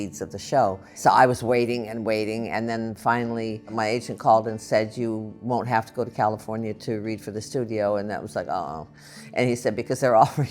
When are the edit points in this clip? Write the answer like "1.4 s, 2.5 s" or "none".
1.0 s, 3.7 s